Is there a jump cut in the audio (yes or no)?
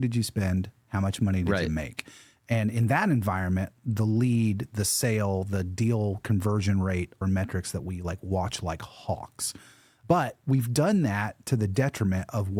no